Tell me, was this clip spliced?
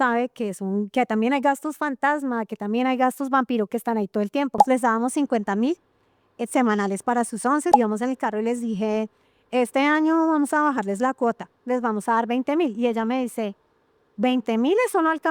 yes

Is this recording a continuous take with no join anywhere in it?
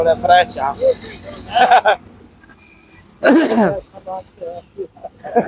yes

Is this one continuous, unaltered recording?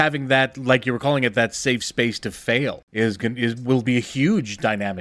no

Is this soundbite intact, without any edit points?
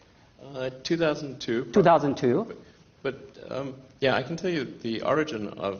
no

